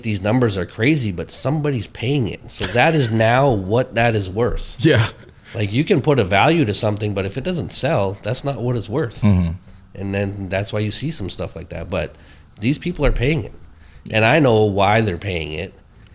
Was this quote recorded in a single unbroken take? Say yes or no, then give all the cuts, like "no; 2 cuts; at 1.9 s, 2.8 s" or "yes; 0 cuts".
yes; 0 cuts